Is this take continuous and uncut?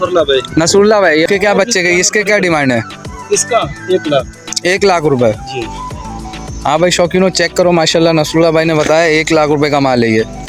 no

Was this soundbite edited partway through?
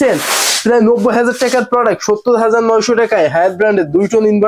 no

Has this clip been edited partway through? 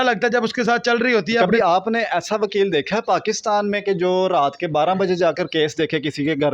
yes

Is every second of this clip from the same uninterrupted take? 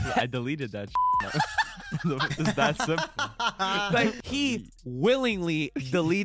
no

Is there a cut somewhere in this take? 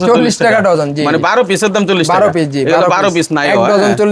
no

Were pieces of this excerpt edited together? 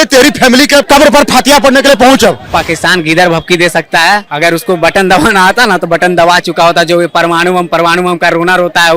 yes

